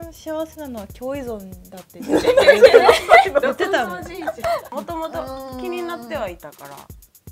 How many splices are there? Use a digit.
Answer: 1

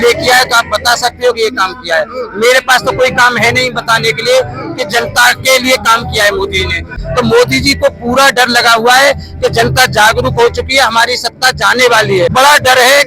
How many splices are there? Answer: 2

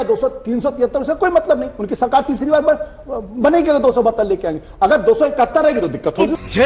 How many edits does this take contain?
0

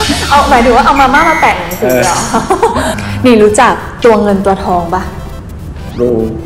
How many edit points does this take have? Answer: 1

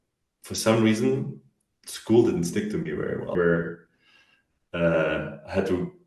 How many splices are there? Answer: 1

